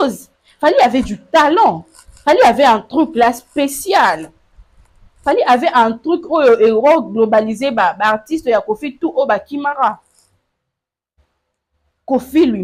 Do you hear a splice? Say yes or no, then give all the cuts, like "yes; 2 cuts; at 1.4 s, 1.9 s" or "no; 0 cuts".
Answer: no; 0 cuts